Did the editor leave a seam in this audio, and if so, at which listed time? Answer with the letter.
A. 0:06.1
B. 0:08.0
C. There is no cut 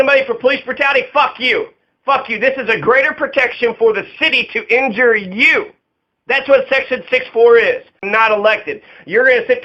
B